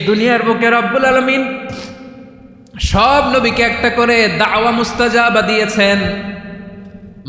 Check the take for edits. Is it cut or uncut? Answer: uncut